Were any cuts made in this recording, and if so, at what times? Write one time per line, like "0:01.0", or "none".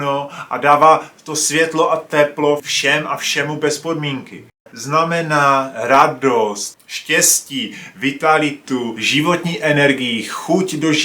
0:04.7
0:09.0